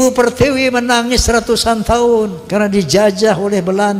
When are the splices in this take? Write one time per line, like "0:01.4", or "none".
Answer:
0:02.4